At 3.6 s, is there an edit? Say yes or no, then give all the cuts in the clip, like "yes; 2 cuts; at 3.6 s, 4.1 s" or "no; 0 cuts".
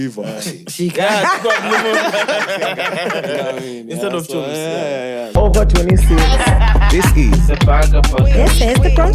no; 1 cut; at 5.3 s